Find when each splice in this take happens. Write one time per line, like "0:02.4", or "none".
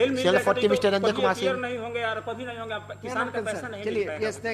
none